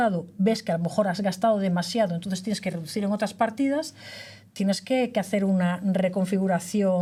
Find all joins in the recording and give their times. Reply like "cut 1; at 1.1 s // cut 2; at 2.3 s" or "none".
none